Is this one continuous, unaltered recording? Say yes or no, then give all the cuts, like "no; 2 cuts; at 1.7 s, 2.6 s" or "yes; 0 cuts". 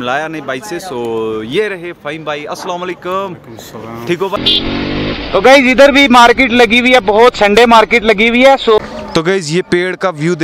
no; 2 cuts; at 4.5 s, 8.8 s